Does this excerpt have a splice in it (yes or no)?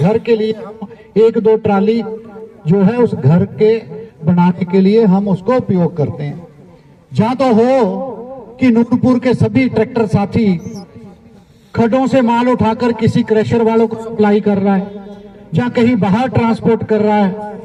no